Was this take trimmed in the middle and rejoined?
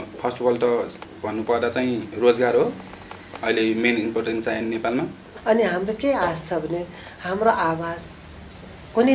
yes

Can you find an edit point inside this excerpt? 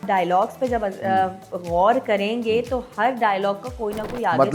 no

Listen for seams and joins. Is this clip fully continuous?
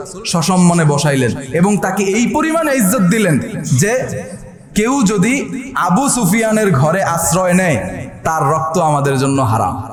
yes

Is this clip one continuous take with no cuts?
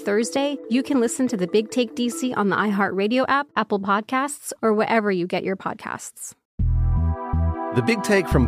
no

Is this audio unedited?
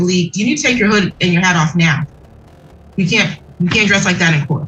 yes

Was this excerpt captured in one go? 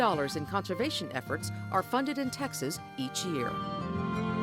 no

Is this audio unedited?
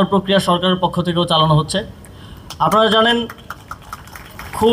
yes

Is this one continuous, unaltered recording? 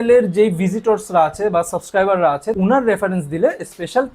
no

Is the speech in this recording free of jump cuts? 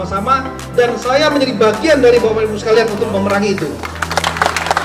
yes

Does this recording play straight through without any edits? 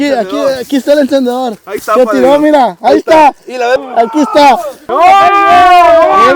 no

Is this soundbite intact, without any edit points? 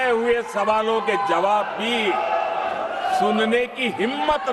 yes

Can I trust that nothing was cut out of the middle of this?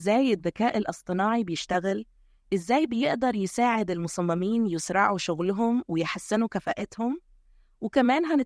yes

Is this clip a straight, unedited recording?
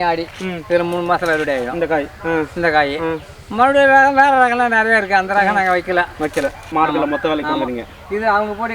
no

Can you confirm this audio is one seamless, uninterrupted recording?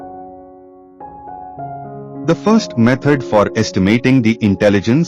no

